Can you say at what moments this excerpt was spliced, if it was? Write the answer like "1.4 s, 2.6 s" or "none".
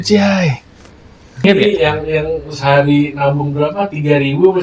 1.4 s